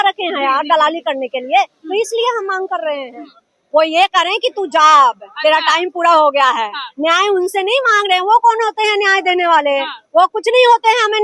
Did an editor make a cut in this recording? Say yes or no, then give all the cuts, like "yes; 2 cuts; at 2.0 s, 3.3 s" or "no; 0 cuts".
yes; 1 cut; at 3.1 s